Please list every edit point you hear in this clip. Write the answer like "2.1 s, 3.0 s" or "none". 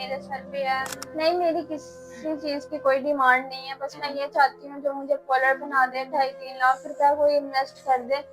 1.0 s